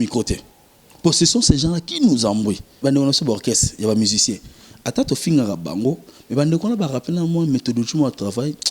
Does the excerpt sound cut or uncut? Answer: cut